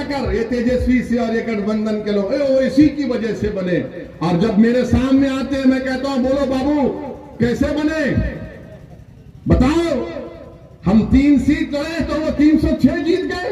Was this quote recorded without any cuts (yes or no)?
yes